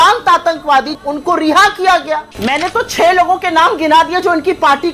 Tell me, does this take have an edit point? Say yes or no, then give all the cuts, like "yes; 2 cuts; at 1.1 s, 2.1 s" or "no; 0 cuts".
yes; 2 cuts; at 0.9 s, 2.3 s